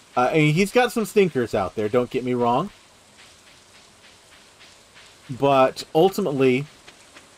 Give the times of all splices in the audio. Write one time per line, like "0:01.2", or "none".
none